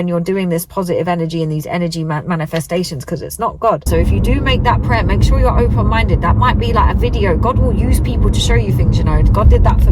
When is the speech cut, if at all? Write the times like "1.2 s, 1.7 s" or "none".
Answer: 3.8 s